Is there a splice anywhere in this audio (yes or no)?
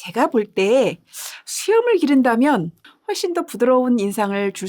yes